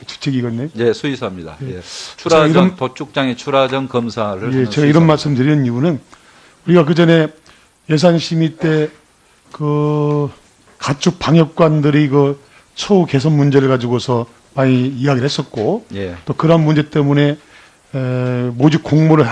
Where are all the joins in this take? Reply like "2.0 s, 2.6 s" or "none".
none